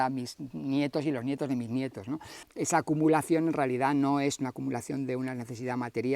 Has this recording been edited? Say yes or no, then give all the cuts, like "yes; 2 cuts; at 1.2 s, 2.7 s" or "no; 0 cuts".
no; 0 cuts